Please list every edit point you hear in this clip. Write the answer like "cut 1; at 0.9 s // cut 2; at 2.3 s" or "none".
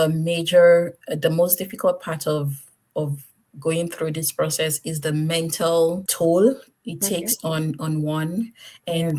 cut 1; at 6.1 s